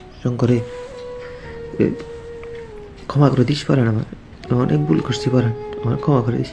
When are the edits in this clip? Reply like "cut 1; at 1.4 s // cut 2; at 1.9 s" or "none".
none